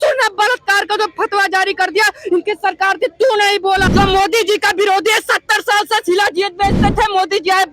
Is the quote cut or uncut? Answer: cut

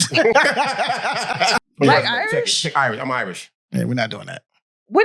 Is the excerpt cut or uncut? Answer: cut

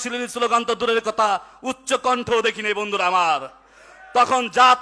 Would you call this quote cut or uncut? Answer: uncut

